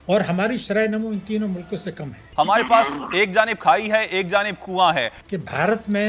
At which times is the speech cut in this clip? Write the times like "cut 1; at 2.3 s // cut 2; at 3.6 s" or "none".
cut 1; at 2.2 s // cut 2; at 5.2 s